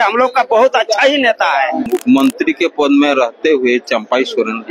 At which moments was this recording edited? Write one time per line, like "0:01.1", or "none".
0:01.9